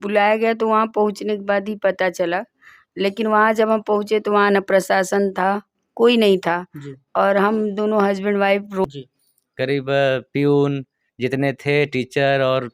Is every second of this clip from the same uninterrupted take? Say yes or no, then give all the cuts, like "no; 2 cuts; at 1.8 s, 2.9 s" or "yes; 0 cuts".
no; 1 cut; at 8.8 s